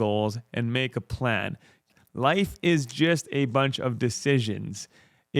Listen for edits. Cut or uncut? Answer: cut